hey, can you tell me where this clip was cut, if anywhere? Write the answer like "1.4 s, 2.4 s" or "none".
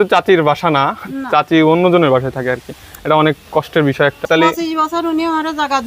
4.2 s